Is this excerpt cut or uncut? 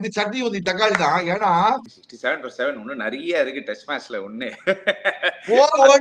cut